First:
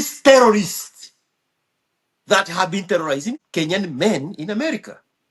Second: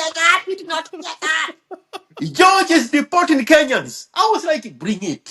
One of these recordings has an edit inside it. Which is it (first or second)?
first